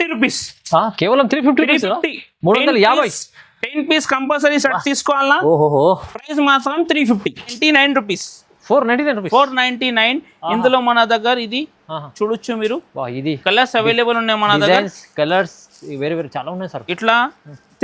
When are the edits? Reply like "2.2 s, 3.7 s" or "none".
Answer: 7.5 s